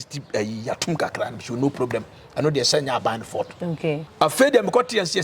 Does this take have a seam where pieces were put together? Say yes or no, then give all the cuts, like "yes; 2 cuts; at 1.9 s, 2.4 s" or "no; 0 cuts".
yes; 1 cut; at 4.1 s